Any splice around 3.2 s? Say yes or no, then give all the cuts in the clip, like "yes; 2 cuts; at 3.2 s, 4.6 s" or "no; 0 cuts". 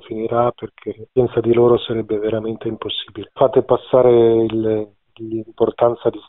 yes; 1 cut; at 3.2 s